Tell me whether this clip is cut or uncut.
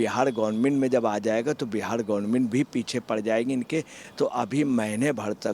uncut